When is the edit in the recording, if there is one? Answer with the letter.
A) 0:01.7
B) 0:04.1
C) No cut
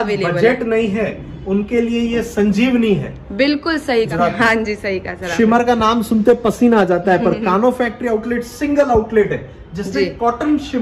B